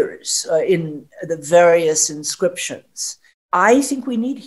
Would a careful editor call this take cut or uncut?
uncut